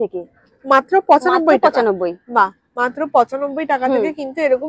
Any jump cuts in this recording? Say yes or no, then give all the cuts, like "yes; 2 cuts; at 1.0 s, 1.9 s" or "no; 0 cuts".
no; 0 cuts